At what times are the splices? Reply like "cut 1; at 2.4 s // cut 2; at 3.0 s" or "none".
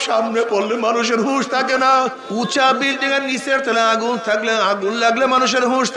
cut 1; at 2.2 s